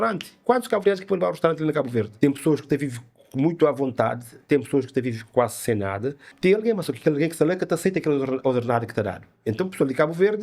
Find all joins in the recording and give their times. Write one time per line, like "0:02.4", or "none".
0:02.1
0:06.2